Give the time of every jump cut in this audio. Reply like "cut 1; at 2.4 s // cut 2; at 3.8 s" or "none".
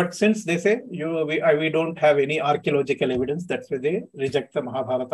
none